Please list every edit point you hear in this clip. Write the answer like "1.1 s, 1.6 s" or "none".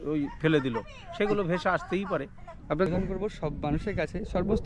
2.9 s